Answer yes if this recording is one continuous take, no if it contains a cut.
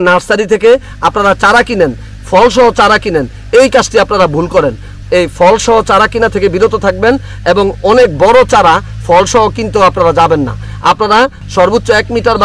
yes